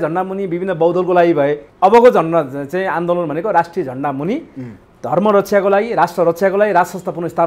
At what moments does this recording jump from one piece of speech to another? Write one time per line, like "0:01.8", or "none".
0:01.6